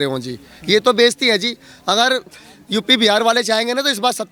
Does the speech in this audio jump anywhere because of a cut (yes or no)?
no